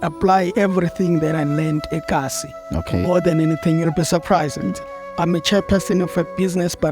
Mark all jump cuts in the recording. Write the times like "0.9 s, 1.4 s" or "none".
none